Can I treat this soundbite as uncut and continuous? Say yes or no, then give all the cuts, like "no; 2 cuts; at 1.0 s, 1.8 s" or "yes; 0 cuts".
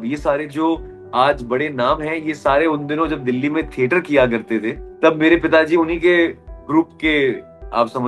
no; 1 cut; at 4.8 s